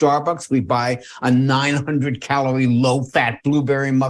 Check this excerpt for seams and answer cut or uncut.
uncut